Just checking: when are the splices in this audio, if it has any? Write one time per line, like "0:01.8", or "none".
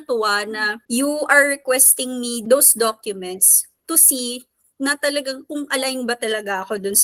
none